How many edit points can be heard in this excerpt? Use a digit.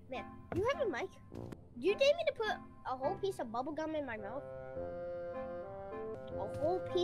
2